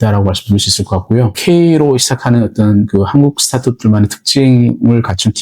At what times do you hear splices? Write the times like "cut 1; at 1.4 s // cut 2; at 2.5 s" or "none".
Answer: cut 1; at 1.4 s